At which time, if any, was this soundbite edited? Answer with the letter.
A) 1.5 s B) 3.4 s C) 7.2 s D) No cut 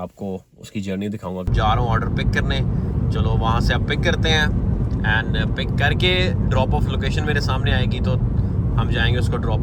A